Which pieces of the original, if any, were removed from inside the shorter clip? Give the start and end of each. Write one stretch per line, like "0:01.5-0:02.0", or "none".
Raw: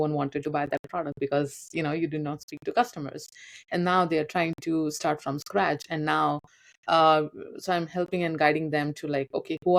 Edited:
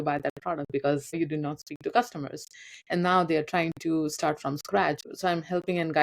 0:01.6-0:02.0
0:05.9-0:07.5